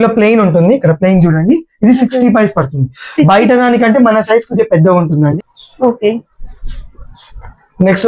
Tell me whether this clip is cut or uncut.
cut